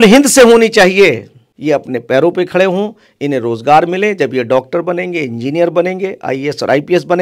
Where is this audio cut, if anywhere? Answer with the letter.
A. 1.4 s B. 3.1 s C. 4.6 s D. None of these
A